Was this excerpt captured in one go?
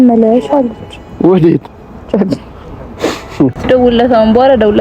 no; 1 cut; at 3.5 s

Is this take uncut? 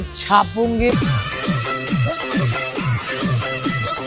no; 1 cut; at 0.9 s

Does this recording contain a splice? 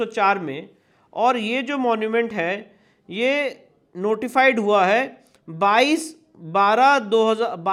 no; 0 cuts

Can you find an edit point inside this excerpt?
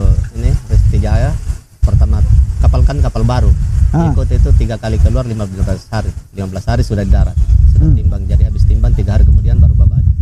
no; 0 cuts

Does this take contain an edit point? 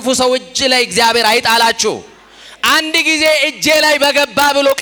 no; 0 cuts

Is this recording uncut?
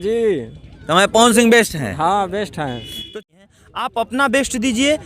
no; 1 cut; at 3.1 s

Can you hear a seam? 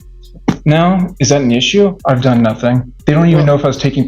yes; 2 cuts; at 2.0 s, 2.9 s

